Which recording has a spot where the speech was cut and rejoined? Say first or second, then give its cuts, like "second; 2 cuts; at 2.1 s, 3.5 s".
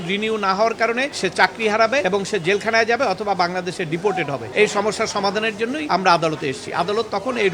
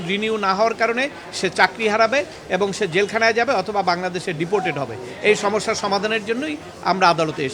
first; 4 cuts; at 1.1 s, 2.0 s, 4.5 s, 5.8 s